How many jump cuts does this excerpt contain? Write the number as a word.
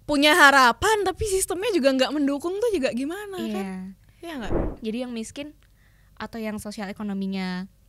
one